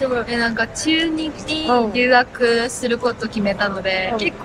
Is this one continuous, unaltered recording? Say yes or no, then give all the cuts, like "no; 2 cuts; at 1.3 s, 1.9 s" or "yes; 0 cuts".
yes; 0 cuts